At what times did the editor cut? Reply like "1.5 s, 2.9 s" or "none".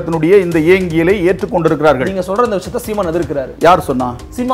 3.5 s